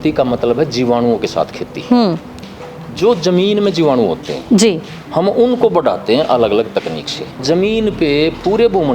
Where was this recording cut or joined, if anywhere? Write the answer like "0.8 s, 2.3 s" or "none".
7.4 s